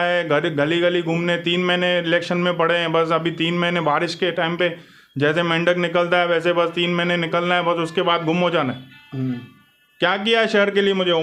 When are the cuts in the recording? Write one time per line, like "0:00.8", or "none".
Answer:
none